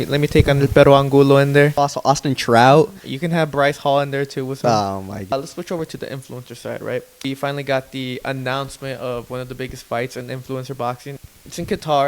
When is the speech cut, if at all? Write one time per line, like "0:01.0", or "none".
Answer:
0:01.8
0:05.3
0:07.2
0:11.2